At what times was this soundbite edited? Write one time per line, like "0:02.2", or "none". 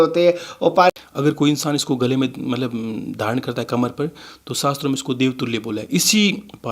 0:01.0